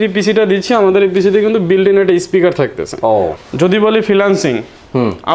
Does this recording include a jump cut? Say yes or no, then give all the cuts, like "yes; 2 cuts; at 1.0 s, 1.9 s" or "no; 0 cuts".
yes; 1 cut; at 3.4 s